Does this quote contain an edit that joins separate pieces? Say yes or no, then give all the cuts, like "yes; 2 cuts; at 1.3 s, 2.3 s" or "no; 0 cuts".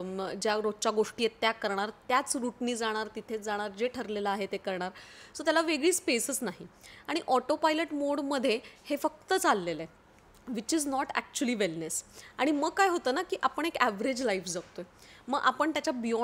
no; 0 cuts